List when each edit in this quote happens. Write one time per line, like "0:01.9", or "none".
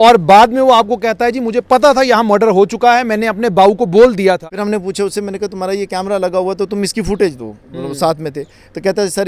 0:04.5